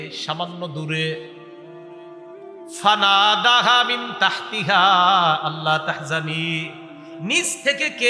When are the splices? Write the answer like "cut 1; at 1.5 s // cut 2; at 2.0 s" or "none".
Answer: cut 1; at 1.2 s // cut 2; at 2.7 s